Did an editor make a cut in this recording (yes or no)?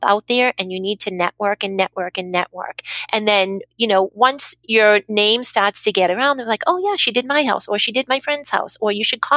no